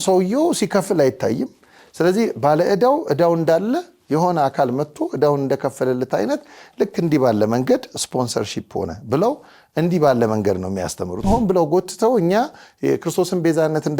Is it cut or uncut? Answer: cut